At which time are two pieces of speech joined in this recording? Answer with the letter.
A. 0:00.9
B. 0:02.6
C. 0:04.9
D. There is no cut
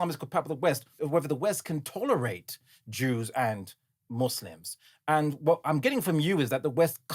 A